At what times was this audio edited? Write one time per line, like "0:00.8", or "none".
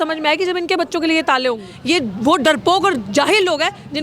0:01.7